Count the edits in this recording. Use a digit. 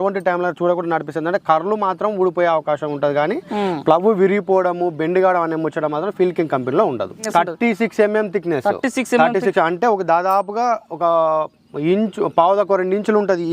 1